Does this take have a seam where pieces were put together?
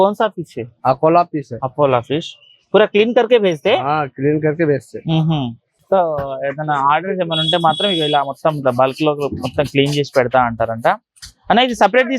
yes; 1 cut; at 5.7 s

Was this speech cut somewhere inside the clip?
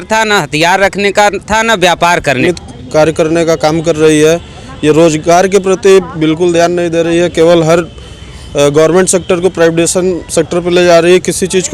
yes; 1 cut; at 2.4 s

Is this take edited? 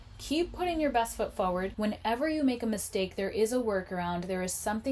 yes; 1 cut; at 1.7 s

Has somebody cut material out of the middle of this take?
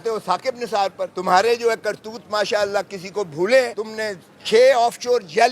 yes; 2 cuts; at 1.1 s, 3.8 s

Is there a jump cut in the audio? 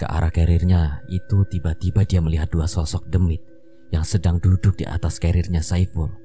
no; 0 cuts

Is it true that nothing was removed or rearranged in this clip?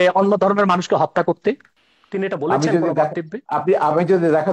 yes; 0 cuts

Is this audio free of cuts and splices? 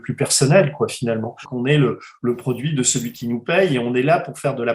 no; 1 cut; at 1.5 s

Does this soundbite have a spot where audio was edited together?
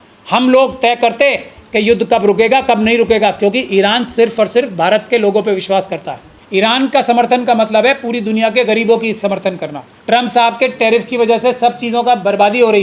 yes; 2 cuts; at 6.4 s, 9.9 s

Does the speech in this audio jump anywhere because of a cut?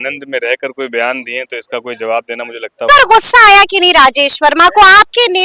yes; 1 cut; at 2.9 s

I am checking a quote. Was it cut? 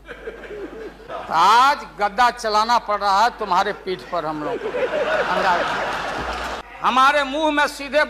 yes; 2 cuts; at 1.0 s, 6.5 s

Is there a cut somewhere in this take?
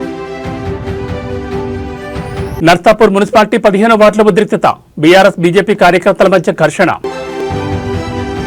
yes; 2 cuts; at 2.6 s, 7.2 s

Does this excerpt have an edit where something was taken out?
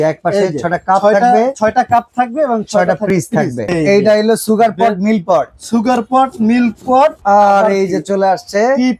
yes; 2 cuts; at 3.7 s, 7.2 s

